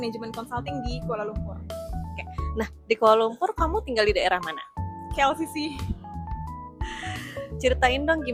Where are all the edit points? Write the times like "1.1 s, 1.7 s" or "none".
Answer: none